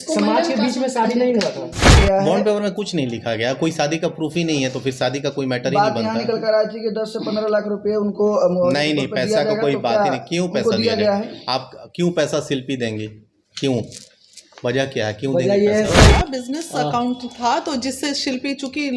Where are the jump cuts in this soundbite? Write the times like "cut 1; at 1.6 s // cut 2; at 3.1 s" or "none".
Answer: cut 1; at 2.0 s // cut 2; at 16.1 s